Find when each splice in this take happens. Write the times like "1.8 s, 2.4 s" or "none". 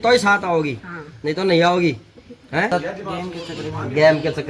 2.7 s